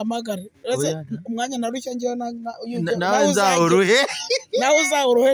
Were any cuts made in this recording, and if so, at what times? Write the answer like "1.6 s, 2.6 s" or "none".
none